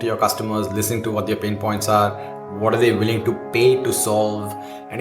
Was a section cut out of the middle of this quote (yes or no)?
no